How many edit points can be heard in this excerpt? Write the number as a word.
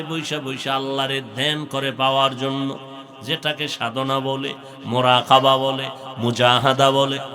zero